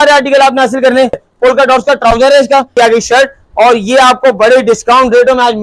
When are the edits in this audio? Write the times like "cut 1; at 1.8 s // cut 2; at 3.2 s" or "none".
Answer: cut 1; at 1.3 s // cut 2; at 2.7 s